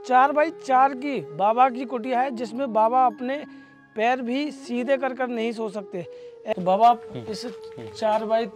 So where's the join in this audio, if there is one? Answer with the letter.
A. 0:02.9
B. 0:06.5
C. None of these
B